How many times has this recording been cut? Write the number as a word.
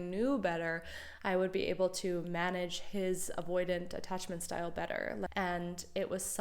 one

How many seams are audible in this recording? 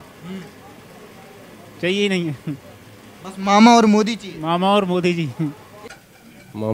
one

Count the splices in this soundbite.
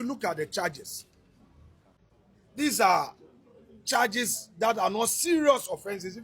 one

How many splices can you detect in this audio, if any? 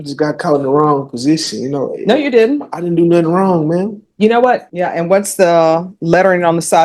one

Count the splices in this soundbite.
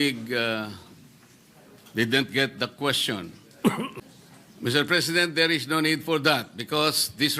one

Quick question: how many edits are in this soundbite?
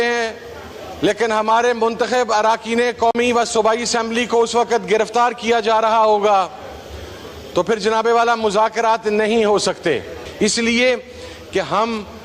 one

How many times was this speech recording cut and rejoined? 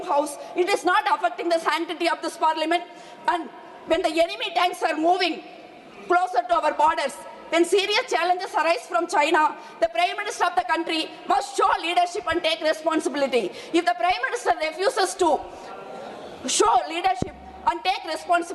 zero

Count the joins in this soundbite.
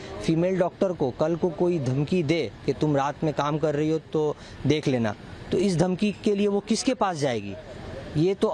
zero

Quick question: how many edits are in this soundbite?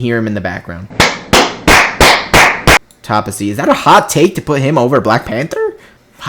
one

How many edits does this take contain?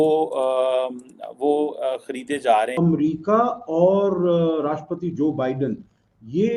one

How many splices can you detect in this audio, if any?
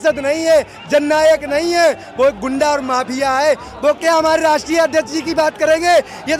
zero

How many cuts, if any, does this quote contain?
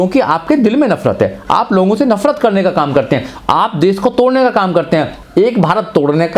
one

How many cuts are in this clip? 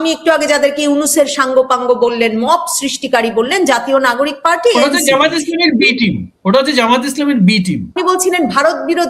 one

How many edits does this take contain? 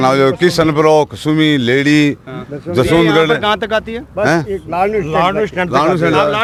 zero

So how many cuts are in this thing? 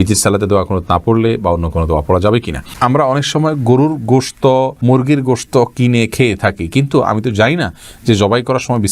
one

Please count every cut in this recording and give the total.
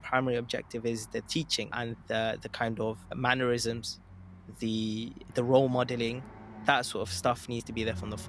three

